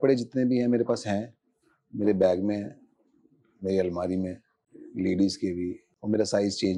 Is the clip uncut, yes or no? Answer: no